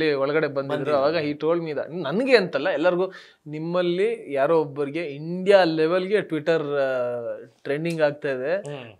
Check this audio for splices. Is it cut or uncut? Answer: uncut